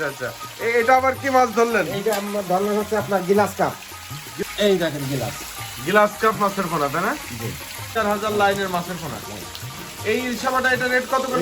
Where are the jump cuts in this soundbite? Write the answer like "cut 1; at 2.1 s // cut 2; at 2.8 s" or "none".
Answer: cut 1; at 4.3 s // cut 2; at 7.9 s